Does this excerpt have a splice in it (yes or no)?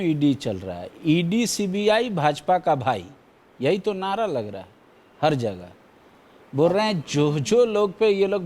no